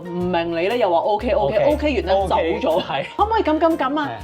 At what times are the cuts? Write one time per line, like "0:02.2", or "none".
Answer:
0:03.1